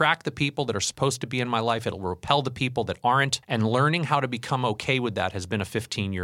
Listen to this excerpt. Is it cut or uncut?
cut